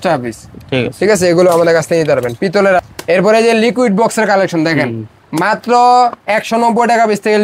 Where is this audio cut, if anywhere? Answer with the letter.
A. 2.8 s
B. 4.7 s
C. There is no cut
A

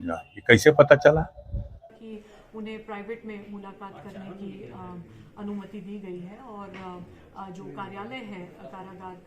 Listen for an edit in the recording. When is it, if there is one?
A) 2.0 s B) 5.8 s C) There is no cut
A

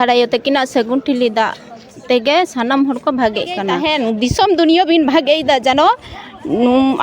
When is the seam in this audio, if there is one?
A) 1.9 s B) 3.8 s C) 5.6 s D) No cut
B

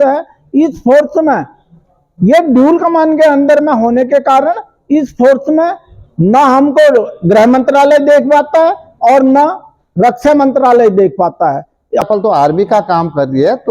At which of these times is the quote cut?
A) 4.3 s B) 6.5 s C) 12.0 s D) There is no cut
C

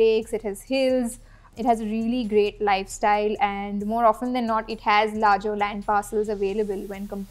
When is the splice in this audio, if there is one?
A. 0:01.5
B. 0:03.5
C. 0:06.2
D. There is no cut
A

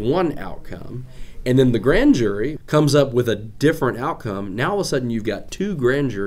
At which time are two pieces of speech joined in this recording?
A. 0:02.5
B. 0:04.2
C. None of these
A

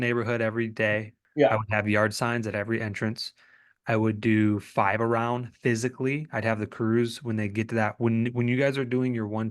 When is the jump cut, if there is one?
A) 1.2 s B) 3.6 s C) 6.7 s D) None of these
A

